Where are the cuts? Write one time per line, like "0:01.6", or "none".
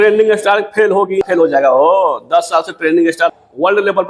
0:01.2
0:03.3